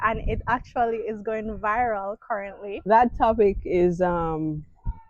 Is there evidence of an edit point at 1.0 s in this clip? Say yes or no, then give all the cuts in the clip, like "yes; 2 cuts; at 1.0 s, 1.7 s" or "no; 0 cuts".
no; 1 cut; at 2.6 s